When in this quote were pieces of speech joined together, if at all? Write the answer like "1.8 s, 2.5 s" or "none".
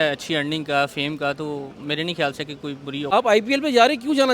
3.1 s